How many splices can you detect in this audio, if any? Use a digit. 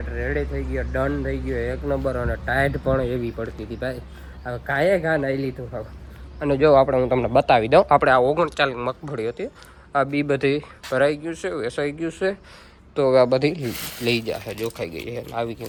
0